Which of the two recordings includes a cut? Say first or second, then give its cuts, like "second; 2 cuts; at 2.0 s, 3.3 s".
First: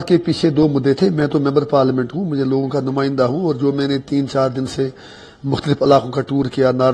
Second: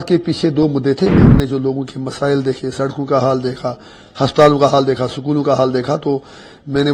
second; 1 cut; at 1.2 s